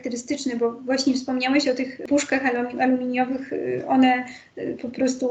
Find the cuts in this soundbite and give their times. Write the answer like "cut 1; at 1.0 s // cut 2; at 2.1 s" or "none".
cut 1; at 2.0 s